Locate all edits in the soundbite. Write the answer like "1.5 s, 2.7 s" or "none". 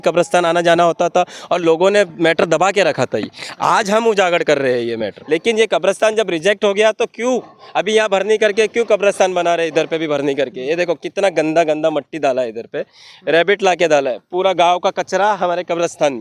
5.1 s